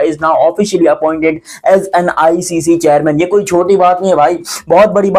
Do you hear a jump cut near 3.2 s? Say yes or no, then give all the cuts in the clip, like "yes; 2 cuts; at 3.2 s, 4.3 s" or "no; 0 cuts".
no; 0 cuts